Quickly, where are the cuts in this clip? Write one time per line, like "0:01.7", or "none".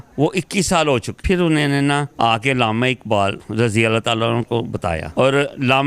0:01.2
0:02.1
0:03.4
0:05.0